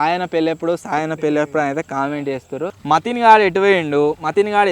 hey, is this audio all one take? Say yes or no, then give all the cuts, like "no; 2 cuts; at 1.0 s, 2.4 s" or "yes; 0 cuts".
no; 1 cut; at 2.7 s